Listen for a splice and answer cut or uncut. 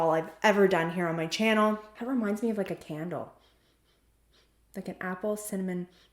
cut